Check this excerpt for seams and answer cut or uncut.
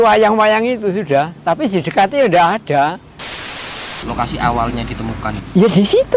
cut